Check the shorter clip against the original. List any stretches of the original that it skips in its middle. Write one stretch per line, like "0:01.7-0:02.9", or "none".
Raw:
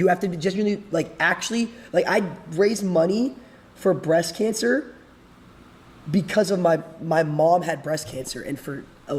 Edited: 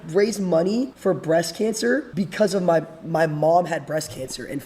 0:03.4-0:03.7
0:04.9-0:06.1